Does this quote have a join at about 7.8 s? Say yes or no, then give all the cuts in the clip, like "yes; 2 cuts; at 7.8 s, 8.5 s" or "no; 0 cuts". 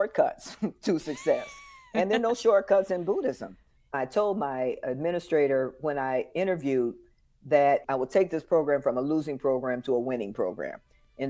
yes; 2 cuts; at 3.9 s, 7.8 s